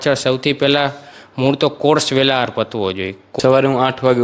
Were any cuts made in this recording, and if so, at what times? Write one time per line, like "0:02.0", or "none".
0:03.3